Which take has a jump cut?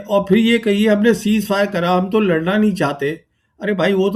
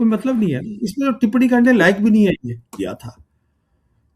second; 1 cut; at 2.8 s

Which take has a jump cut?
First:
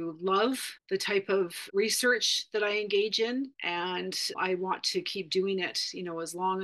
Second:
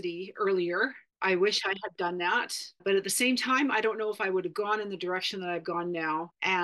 first; 1 cut; at 4.3 s

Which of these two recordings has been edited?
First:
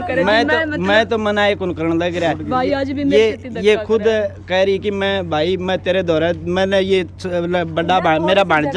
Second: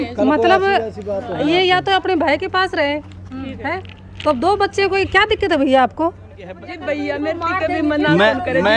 second; 1 cut; at 6.7 s

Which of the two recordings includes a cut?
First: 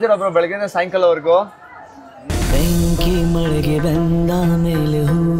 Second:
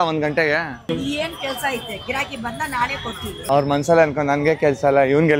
second; 1 cut; at 3.4 s

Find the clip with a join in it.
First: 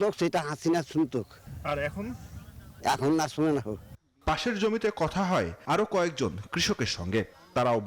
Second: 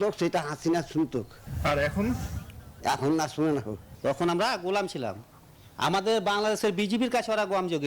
second; 1 cut; at 3.9 s

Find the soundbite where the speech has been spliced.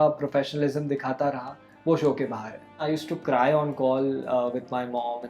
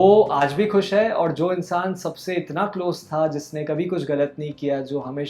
first; 1 cut; at 2.8 s

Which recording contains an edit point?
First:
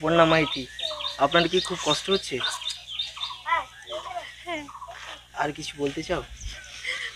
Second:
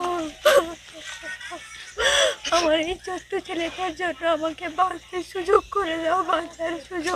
first; 1 cut; at 5.2 s

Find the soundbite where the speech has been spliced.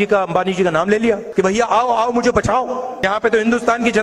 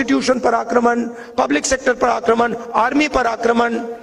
first; 2 cuts; at 1.2 s, 3.1 s

